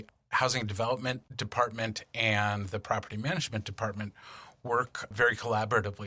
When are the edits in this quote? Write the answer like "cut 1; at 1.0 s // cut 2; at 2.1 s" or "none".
cut 1; at 1.3 s